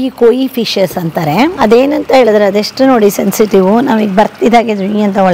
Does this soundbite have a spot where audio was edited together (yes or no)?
yes